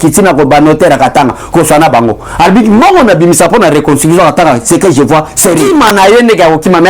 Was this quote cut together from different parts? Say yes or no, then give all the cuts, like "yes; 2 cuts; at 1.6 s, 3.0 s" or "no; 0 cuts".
yes; 1 cut; at 5.6 s